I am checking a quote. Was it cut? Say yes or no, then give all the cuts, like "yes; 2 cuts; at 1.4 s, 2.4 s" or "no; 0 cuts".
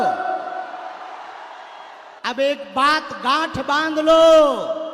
yes; 1 cut; at 2.1 s